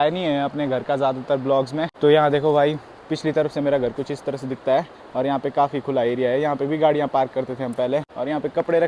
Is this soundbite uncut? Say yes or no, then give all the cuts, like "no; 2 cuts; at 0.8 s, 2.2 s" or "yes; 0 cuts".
yes; 0 cuts